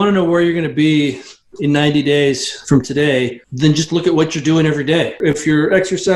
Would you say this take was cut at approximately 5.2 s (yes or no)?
yes